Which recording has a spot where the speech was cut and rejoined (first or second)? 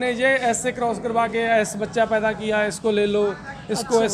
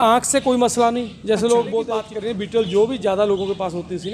second